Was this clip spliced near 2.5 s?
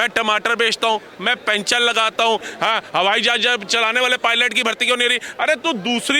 yes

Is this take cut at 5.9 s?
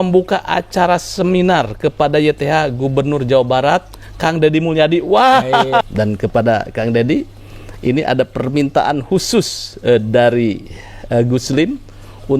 yes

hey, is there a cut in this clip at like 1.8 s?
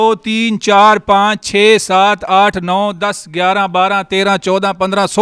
no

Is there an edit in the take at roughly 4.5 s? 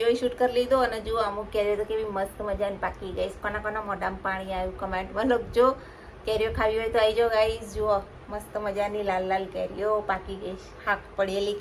no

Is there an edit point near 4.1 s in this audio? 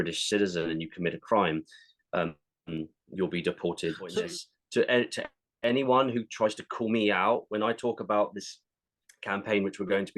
yes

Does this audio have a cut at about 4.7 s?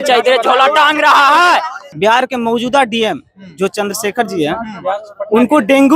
no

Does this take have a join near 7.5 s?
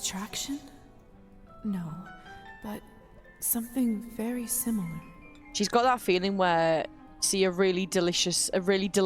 no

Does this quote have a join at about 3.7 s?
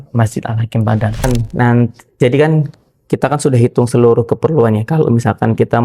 no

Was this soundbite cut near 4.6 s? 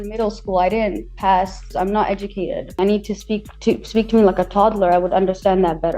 no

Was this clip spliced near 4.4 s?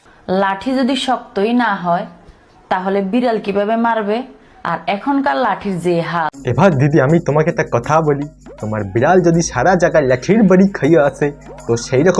no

